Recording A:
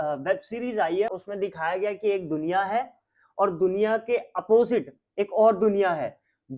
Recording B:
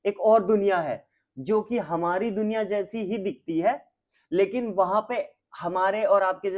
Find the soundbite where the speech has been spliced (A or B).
A